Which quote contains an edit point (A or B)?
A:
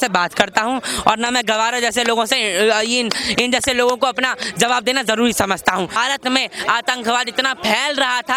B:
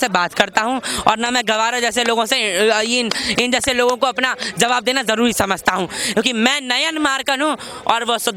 A